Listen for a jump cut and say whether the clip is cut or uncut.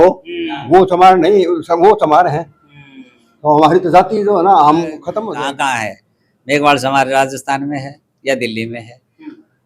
cut